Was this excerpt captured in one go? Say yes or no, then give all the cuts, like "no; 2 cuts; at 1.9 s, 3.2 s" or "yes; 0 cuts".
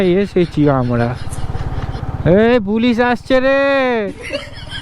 no; 1 cut; at 2.0 s